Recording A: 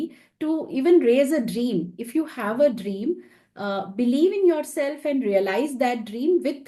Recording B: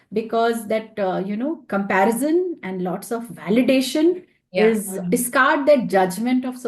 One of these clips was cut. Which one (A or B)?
B